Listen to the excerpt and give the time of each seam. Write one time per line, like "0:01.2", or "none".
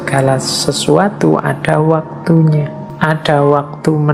0:02.8